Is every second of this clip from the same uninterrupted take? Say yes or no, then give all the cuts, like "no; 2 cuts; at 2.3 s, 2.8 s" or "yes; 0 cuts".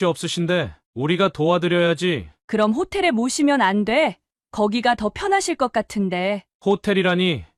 yes; 0 cuts